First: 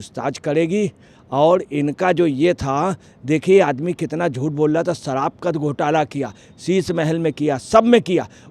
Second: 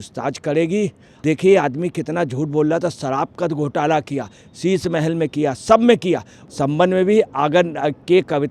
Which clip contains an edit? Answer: second; 2 cuts; at 1.1 s, 6.4 s

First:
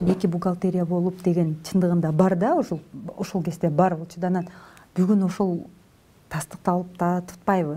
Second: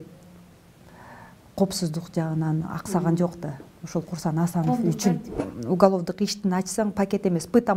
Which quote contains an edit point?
second; 1 cut; at 5.4 s

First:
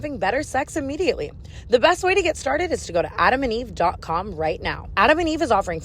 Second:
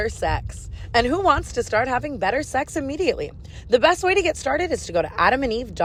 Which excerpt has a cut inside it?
first; 1 cut; at 4.8 s

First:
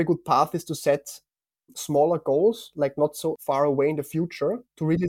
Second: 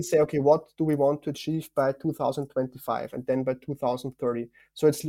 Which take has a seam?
first; 1 cut; at 3.4 s

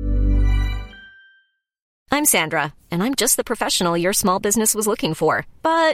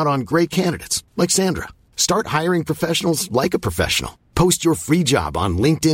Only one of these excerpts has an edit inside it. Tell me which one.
first; 1 cut; at 1.9 s

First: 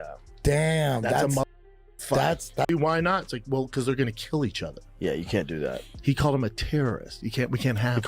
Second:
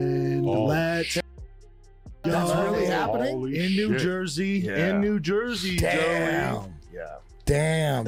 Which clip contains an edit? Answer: first; 1 cut; at 2.7 s

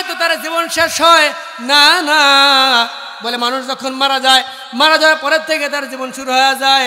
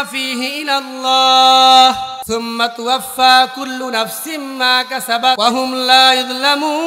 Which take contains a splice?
second; 2 cuts; at 2.1 s, 5.4 s

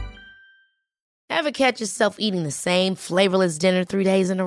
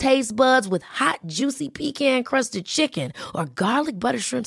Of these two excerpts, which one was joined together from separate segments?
first; 1 cut; at 1.1 s

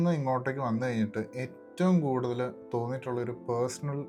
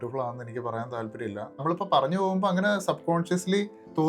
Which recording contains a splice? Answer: second; 1 cut; at 1.6 s

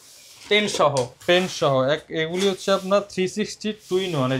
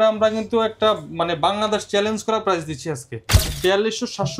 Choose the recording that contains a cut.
second; 1 cut; at 3.5 s

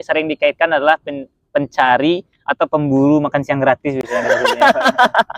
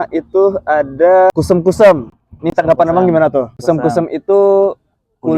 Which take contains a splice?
second; 2 cuts; at 1.3 s, 3.5 s

